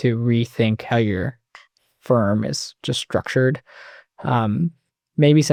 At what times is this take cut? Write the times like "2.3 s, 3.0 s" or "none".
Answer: none